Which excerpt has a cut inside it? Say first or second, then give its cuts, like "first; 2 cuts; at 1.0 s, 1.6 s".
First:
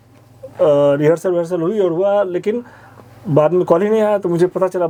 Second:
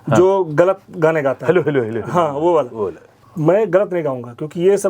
second; 1 cut; at 3.1 s